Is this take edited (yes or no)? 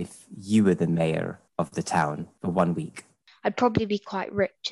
yes